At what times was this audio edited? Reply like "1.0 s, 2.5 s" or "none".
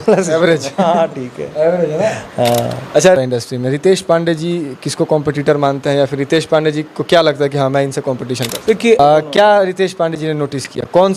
3.2 s, 9.0 s